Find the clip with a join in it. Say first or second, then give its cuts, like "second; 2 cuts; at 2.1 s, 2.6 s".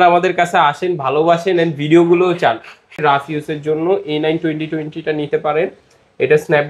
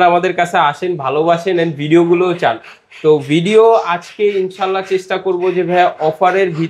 first; 1 cut; at 3.0 s